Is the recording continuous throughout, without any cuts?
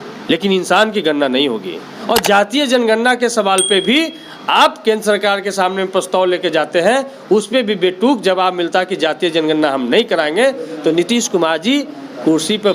no; 1 cut; at 1.9 s

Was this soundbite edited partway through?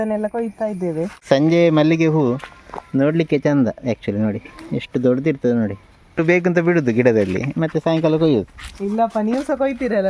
yes; 2 cuts; at 1.2 s, 6.2 s

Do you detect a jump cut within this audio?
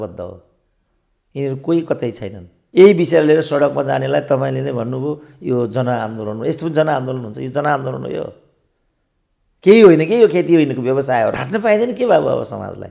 yes; 2 cuts; at 2.5 s, 11.3 s

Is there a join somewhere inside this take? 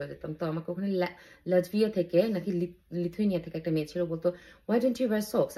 no; 0 cuts

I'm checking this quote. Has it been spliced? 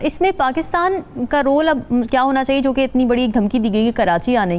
no; 0 cuts

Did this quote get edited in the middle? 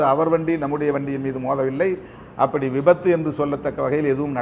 no; 0 cuts

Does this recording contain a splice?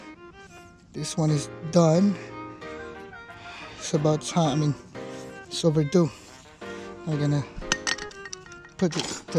no; 0 cuts

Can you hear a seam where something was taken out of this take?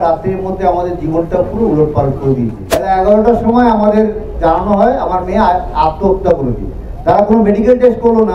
yes; 1 cut; at 2.6 s

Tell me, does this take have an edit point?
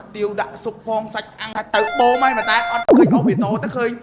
yes; 2 cuts; at 1.5 s, 2.9 s

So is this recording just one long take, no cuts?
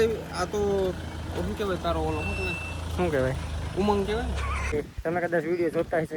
no; 1 cut; at 4.7 s

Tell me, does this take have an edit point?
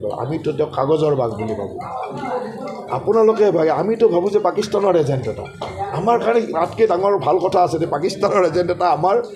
no; 0 cuts

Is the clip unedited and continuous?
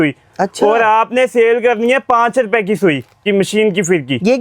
no; 1 cut; at 3.2 s

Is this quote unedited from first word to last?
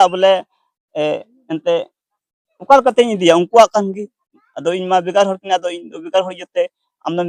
yes; 0 cuts

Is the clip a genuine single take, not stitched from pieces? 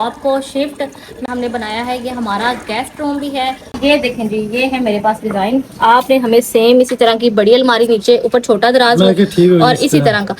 no; 2 cuts; at 1.3 s, 3.7 s

